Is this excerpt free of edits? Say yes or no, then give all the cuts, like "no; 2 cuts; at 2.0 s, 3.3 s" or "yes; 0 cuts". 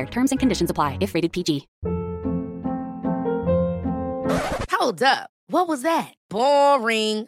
no; 1 cut; at 1.7 s